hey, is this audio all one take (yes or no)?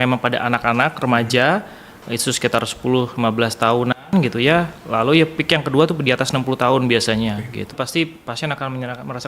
no